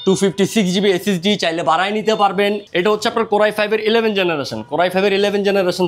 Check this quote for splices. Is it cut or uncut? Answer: cut